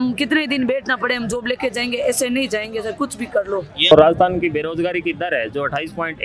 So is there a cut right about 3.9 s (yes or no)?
yes